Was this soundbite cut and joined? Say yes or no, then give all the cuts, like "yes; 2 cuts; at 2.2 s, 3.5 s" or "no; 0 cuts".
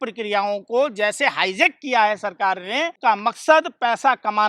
yes; 1 cut; at 2.9 s